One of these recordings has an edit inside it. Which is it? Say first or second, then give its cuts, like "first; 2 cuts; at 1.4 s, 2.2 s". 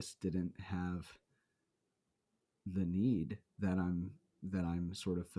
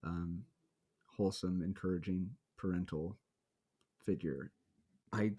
second; 1 cut; at 4.5 s